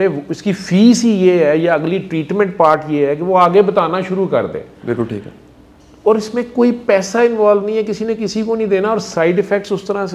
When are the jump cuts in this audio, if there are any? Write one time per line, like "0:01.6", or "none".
none